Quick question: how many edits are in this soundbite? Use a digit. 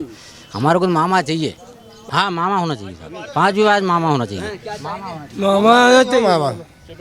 1